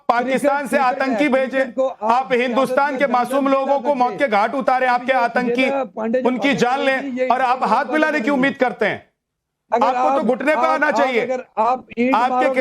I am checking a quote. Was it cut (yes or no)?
yes